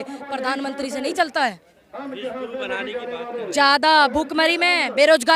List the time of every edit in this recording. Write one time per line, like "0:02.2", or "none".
none